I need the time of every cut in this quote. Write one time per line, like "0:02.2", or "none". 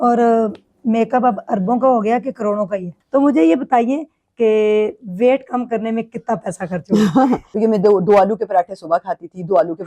0:02.9
0:07.5